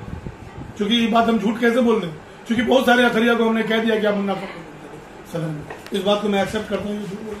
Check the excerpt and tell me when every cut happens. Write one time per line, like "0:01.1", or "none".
none